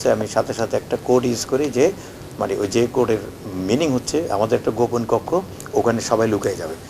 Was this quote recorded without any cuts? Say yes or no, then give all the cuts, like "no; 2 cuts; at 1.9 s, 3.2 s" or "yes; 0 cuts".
yes; 0 cuts